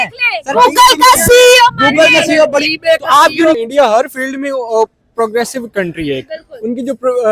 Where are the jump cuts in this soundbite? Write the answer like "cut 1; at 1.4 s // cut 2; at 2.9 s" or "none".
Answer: cut 1; at 3.6 s